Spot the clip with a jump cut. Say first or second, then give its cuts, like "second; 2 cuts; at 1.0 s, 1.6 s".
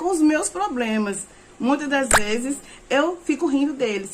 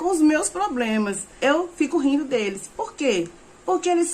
second; 1 cut; at 1.2 s